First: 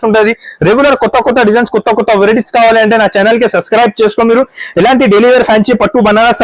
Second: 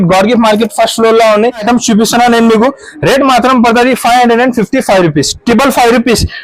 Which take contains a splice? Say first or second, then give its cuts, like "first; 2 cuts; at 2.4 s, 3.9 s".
second; 1 cut; at 1.6 s